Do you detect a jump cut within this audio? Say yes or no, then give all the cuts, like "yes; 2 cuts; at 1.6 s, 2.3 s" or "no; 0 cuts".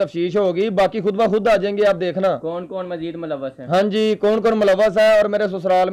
no; 0 cuts